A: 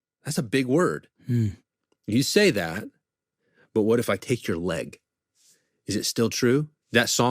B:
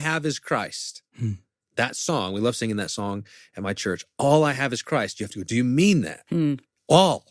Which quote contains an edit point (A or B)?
A